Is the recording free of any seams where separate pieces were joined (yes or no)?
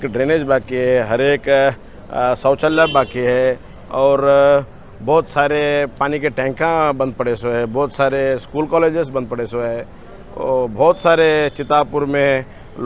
yes